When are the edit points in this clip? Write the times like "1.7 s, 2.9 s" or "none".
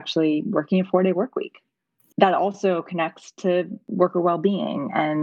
2.1 s, 3.8 s